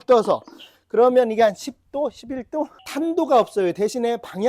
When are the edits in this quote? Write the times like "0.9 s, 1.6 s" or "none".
2.8 s